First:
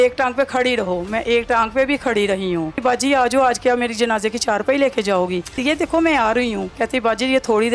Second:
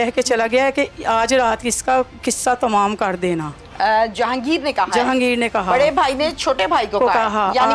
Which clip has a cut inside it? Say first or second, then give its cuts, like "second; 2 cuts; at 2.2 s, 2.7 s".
first; 3 cuts; at 2.8 s, 5.6 s, 6.7 s